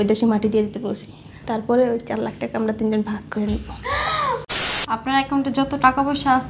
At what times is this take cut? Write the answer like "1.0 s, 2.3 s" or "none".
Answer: 4.5 s